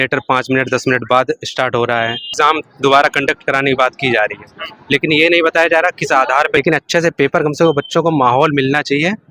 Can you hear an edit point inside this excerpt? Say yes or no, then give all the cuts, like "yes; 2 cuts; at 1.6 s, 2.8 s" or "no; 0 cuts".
yes; 2 cuts; at 2.3 s, 6.6 s